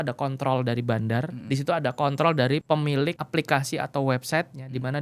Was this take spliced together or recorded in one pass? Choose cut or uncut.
cut